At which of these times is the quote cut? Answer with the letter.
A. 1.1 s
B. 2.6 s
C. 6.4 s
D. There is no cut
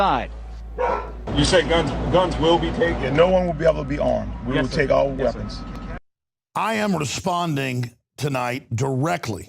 D